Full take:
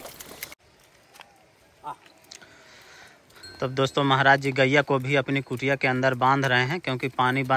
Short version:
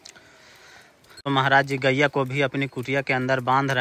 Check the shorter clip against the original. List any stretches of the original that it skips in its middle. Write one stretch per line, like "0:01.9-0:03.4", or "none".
0:03.5-0:04.0